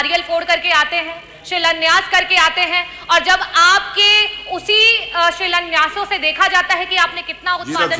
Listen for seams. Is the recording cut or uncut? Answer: uncut